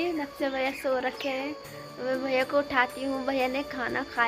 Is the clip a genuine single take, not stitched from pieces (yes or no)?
yes